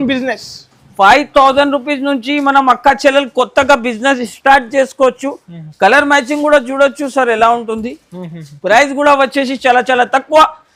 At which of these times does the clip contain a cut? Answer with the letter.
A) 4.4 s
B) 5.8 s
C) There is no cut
C